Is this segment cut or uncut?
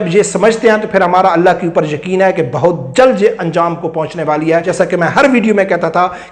cut